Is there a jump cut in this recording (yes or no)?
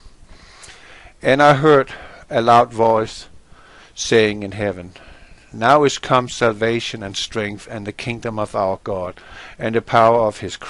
no